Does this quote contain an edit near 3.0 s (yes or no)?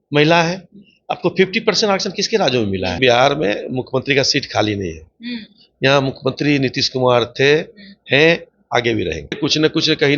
yes